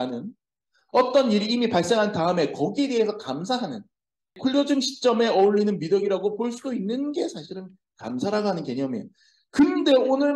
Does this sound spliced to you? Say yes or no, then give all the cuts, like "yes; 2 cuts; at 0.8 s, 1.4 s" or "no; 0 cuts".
yes; 1 cut; at 4.3 s